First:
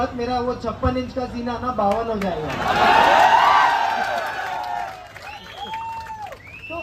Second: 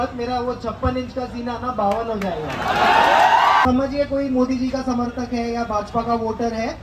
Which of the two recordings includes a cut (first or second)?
second